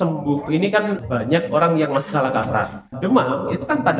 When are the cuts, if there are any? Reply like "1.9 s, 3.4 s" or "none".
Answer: 1.0 s, 2.9 s